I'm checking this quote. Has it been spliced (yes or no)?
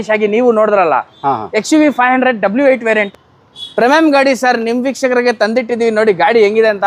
yes